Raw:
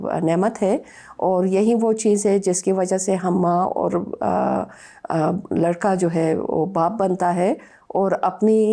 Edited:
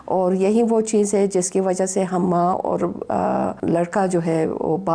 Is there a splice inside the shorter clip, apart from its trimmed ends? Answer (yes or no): yes